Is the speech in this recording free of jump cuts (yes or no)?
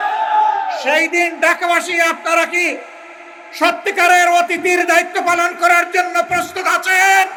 yes